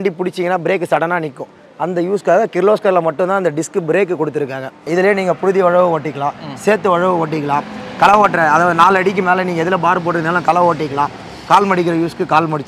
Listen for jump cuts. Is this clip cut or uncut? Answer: cut